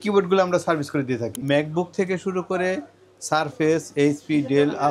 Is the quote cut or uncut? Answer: cut